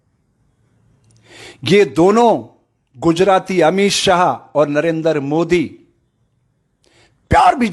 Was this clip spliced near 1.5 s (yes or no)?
no